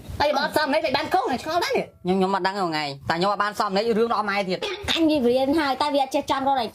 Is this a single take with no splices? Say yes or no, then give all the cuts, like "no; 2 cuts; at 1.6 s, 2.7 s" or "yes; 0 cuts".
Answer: no; 2 cuts; at 2.9 s, 4.8 s